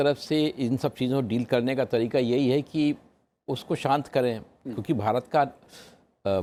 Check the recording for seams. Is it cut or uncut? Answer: uncut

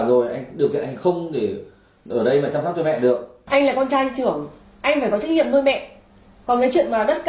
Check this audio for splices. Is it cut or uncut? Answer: cut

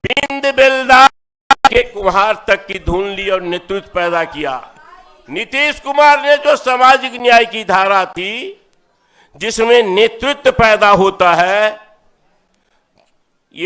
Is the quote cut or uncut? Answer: uncut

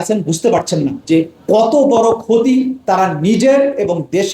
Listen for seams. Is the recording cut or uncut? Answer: cut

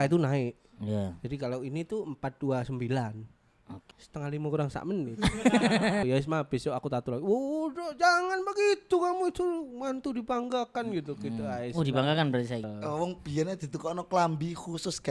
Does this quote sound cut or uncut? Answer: cut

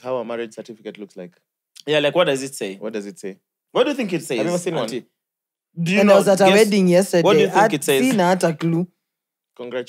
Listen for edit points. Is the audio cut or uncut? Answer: uncut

